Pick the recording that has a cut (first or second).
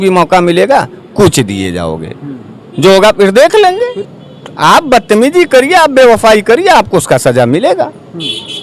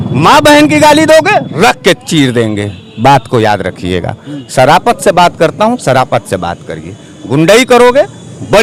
first